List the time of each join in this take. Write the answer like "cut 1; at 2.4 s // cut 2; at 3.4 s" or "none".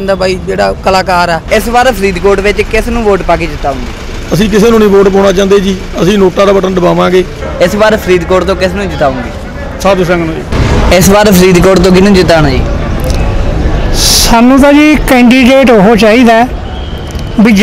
cut 1; at 1.4 s // cut 2; at 7.4 s // cut 3; at 10.5 s